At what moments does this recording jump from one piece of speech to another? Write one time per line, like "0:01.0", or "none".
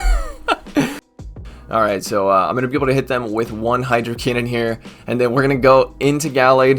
0:01.1